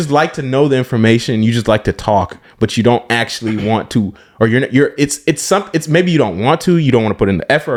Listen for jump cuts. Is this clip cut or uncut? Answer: uncut